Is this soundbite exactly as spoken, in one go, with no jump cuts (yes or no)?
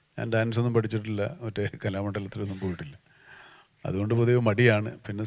yes